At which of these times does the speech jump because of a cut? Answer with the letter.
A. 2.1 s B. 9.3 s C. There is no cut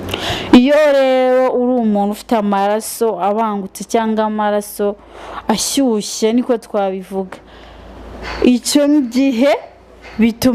C